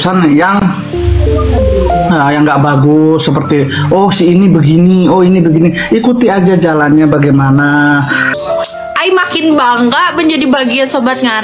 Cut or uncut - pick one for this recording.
cut